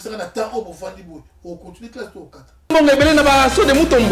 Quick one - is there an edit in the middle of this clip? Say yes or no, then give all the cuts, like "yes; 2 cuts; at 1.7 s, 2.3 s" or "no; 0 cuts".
yes; 1 cut; at 2.7 s